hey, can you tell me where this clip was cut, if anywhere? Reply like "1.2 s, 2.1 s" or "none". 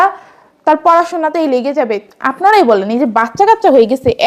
none